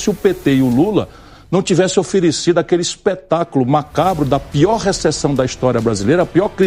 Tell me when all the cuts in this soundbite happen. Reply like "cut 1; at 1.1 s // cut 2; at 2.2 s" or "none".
none